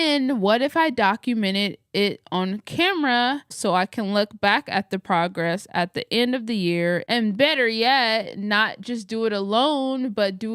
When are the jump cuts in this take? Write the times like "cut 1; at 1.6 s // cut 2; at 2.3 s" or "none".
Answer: cut 1; at 3.6 s